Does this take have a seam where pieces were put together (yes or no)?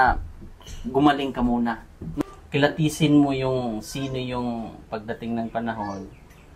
yes